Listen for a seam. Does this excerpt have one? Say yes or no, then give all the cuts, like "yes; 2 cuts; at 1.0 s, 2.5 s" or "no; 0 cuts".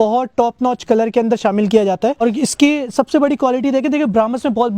yes; 1 cut; at 2.2 s